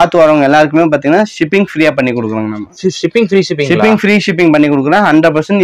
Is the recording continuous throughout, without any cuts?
yes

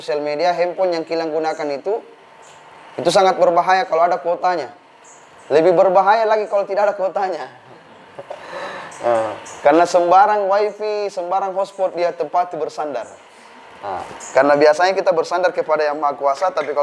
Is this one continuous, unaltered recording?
yes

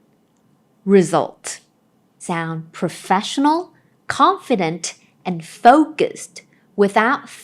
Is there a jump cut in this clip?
yes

